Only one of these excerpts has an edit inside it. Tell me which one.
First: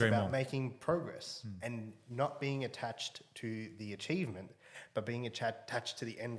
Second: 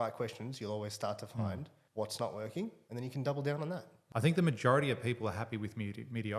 second; 3 cuts; at 1.7 s, 2.8 s, 3.9 s

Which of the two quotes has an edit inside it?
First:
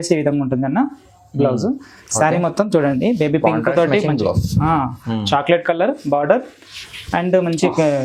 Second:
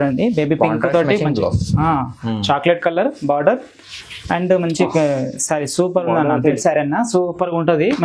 second; 1 cut; at 6.6 s

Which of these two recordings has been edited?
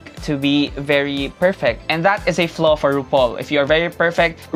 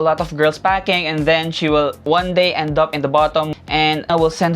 second; 2 cuts; at 2.0 s, 3.5 s

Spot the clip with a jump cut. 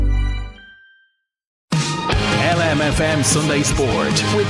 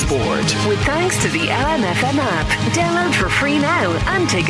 first; 1 cut; at 1.6 s

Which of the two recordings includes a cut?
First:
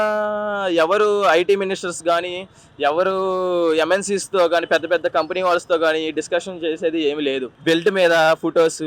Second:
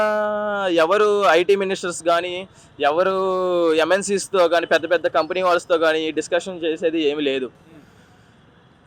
first; 1 cut; at 7.5 s

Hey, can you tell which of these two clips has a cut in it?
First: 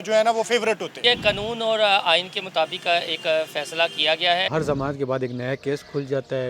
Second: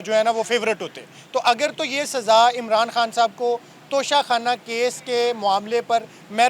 first; 2 cuts; at 1.0 s, 4.5 s

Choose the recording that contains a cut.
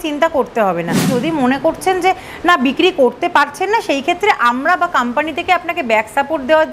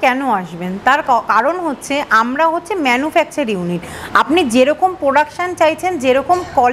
first; 1 cut; at 1.1 s

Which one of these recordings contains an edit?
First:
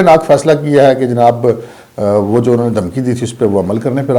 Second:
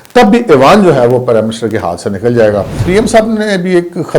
second; 1 cut; at 2.8 s

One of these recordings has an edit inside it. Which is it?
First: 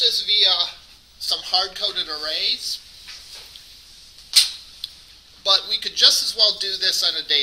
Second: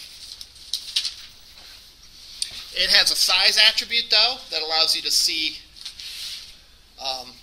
first; 1 cut; at 2.9 s

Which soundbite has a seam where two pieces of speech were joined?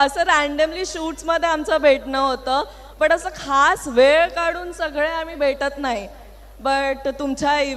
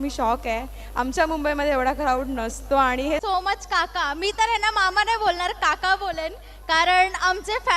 second; 1 cut; at 3.2 s

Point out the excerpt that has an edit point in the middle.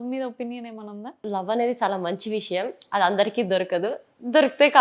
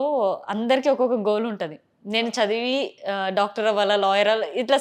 first; 1 cut; at 1.2 s

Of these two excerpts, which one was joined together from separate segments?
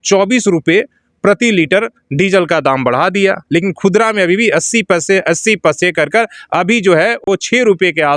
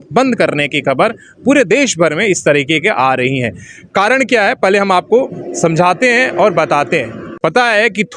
second; 1 cut; at 7.2 s

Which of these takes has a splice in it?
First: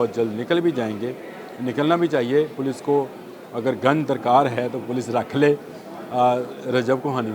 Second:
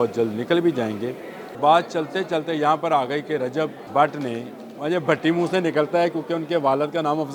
second; 2 cuts; at 1.6 s, 3.8 s

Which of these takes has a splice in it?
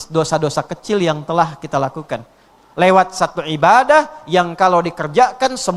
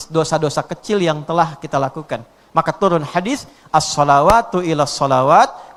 first; 1 cut; at 2.4 s

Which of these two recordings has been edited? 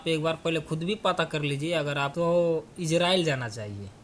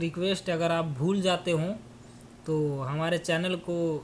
first; 1 cut; at 2.1 s

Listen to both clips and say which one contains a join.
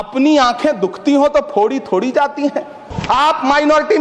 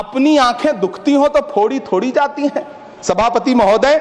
first; 1 cut; at 2.9 s

